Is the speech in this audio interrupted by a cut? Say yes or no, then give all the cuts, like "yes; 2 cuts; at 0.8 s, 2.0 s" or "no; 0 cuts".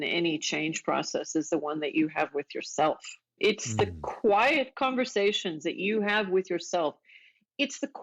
yes; 1 cut; at 3.4 s